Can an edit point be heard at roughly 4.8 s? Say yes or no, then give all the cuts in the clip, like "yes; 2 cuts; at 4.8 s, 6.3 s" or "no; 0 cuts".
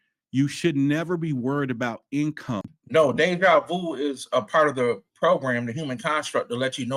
no; 1 cut; at 2.7 s